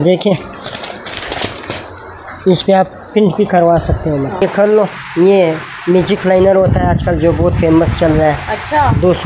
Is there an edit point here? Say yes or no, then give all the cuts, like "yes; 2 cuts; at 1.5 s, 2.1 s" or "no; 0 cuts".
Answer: yes; 1 cut; at 4.4 s